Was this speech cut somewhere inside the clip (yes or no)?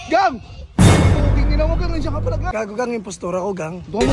yes